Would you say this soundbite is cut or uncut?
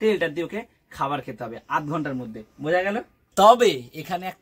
cut